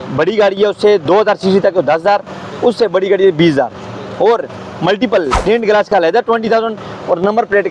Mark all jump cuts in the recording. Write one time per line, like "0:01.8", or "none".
0:05.3